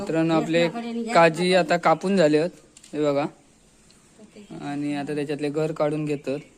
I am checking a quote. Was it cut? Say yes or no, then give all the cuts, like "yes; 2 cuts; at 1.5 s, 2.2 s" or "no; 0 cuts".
no; 0 cuts